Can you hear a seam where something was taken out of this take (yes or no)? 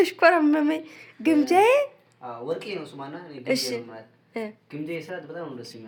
no